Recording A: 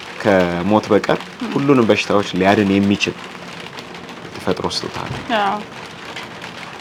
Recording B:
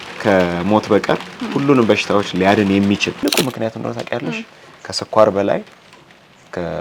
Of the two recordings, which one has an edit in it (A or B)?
B